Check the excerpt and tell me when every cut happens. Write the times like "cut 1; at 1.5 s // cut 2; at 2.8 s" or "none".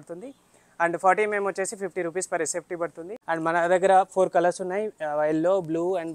cut 1; at 3.1 s

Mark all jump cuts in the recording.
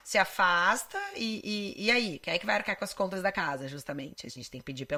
none

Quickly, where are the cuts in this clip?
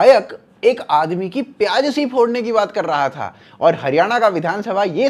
none

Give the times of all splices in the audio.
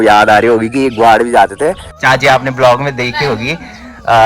cut 1; at 1.9 s

